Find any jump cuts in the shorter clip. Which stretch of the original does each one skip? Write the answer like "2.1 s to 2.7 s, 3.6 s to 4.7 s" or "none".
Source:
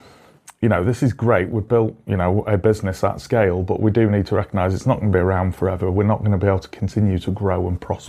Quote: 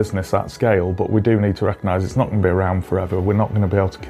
none